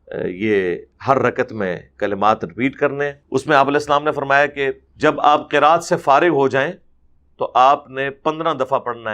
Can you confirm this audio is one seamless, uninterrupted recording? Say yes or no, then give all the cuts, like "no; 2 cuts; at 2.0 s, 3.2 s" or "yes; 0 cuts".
no; 2 cuts; at 3.2 s, 4.9 s